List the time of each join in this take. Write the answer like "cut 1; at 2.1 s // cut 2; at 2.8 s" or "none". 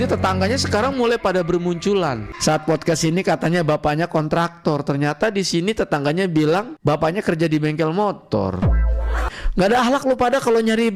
cut 1; at 2.3 s // cut 2; at 9.2 s